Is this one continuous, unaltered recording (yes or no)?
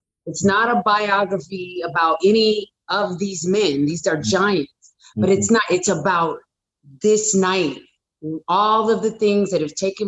yes